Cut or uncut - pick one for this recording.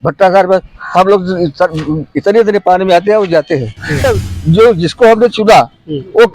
cut